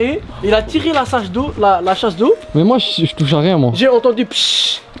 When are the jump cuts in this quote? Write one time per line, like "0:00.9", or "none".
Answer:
none